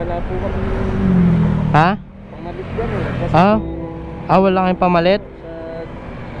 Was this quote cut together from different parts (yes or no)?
no